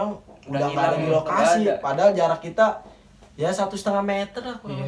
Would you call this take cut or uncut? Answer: uncut